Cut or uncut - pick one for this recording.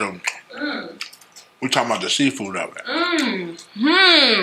uncut